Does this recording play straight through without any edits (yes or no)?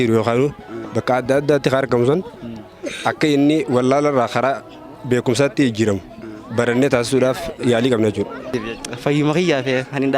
no